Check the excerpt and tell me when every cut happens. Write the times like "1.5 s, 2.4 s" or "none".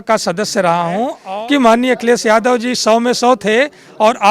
1.2 s